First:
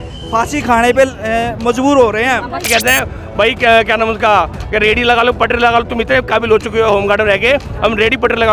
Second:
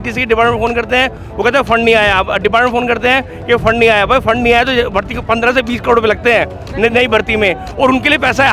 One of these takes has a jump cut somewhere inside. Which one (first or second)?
first